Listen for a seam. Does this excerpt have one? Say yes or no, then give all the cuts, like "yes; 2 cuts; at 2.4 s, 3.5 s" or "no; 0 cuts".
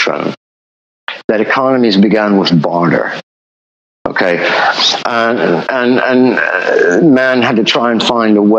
no; 0 cuts